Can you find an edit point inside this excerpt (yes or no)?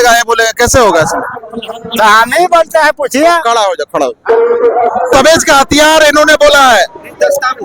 yes